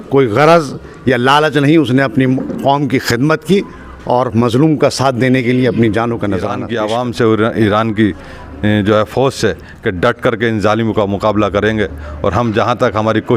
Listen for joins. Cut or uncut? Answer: cut